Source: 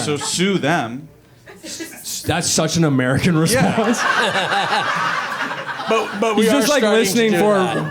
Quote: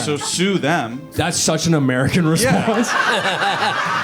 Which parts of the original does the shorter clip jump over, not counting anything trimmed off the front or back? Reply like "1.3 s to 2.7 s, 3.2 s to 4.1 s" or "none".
1.0 s to 2.1 s